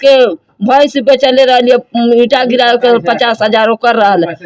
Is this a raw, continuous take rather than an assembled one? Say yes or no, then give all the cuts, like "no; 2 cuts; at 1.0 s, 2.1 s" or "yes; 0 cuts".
yes; 0 cuts